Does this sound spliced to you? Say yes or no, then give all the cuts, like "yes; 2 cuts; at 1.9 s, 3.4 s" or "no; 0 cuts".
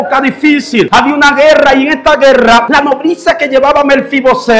yes; 2 cuts; at 0.9 s, 2.7 s